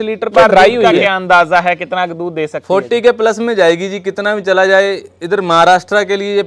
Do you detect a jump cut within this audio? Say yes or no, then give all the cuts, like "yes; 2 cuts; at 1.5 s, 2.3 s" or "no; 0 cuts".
yes; 1 cut; at 1.1 s